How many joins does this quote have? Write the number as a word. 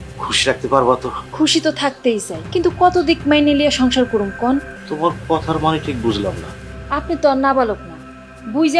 three